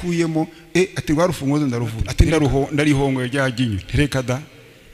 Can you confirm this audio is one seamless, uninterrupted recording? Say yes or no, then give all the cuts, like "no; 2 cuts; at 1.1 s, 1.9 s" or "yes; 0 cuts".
no; 1 cut; at 2.0 s